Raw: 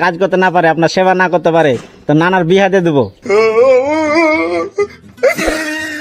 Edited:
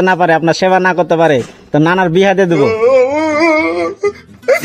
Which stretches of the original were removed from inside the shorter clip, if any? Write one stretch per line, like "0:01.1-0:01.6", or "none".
0:03.0-0:03.4